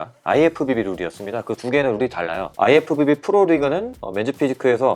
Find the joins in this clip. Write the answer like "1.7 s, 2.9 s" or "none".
none